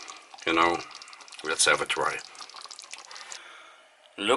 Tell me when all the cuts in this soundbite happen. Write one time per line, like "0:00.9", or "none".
0:03.4